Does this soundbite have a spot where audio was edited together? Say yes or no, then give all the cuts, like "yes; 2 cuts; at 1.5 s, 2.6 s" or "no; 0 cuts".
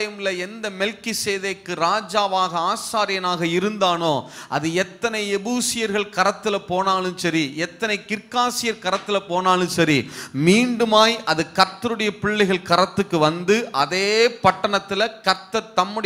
no; 0 cuts